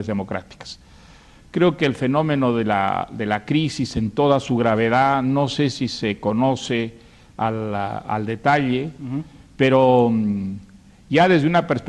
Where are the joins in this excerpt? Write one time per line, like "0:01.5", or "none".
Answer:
0:04.1